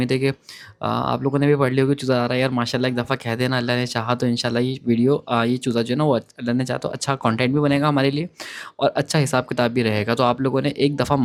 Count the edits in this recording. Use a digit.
0